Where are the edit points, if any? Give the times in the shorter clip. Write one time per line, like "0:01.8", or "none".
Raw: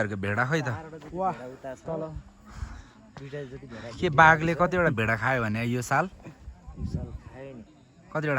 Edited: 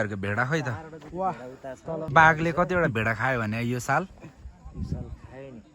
0:02.1